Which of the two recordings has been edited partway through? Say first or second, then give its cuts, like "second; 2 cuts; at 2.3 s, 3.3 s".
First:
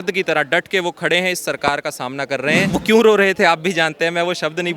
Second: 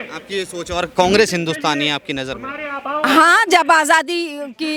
first; 1 cut; at 2.7 s